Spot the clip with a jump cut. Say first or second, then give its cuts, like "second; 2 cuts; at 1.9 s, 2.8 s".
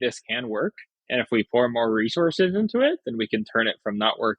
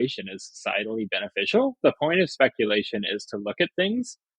first; 1 cut; at 0.9 s